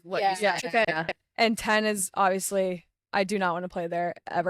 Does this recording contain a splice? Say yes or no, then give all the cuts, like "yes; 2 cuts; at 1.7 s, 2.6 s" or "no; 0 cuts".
no; 0 cuts